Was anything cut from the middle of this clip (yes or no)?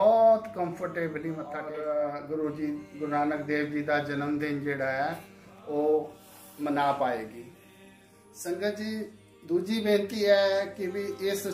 yes